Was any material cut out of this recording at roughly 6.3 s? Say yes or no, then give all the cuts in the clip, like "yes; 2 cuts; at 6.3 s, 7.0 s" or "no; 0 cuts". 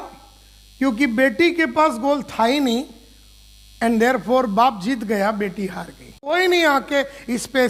yes; 1 cut; at 6.3 s